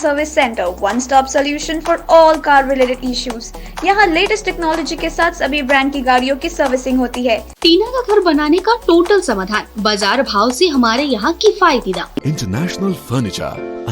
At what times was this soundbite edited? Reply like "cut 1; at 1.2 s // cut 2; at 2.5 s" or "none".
cut 1; at 7.5 s // cut 2; at 12.2 s